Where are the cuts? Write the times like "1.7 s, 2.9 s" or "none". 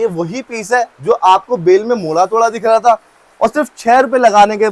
none